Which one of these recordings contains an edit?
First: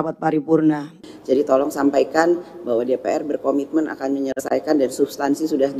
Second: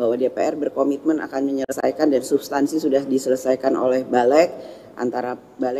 first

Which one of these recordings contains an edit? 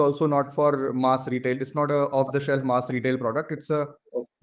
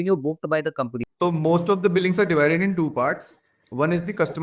second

